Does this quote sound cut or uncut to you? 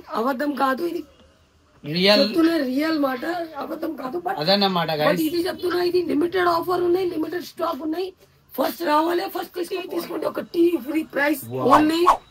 cut